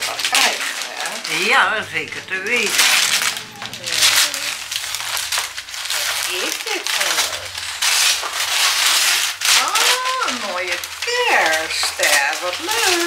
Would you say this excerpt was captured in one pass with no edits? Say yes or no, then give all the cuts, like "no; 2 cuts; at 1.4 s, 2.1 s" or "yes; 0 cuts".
yes; 0 cuts